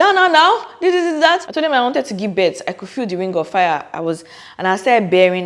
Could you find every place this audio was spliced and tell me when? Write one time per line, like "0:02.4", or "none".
0:01.5